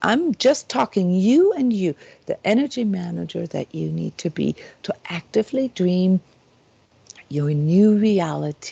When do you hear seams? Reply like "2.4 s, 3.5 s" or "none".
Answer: none